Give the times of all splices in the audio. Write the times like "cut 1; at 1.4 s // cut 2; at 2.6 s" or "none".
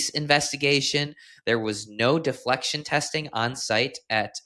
none